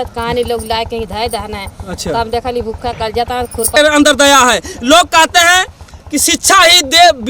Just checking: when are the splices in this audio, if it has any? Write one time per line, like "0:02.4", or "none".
0:03.7

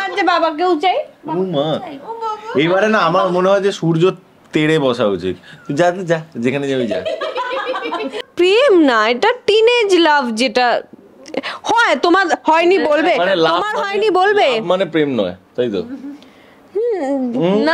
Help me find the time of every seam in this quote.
0:08.3

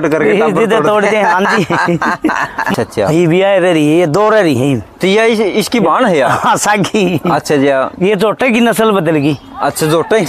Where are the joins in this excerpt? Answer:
0:02.7

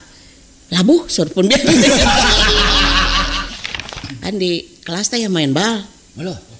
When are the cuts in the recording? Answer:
0:03.6

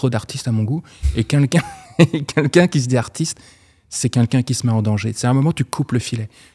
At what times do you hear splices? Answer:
none

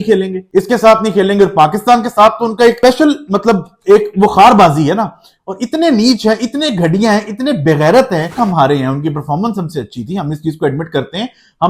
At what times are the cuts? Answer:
0:08.3

